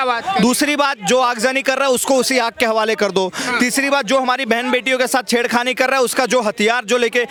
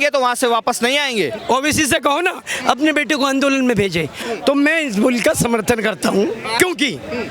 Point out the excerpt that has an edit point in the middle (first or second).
second